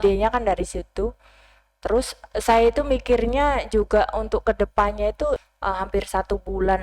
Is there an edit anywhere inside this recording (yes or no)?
yes